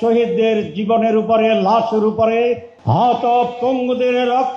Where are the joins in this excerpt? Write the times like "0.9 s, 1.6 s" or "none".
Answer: 2.7 s